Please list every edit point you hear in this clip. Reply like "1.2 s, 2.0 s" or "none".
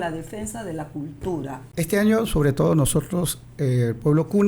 1.6 s